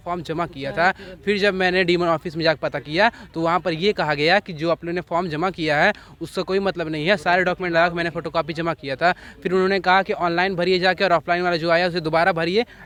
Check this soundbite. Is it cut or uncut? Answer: uncut